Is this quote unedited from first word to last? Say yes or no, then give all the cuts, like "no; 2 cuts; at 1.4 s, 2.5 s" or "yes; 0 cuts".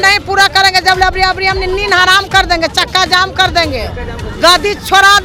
yes; 0 cuts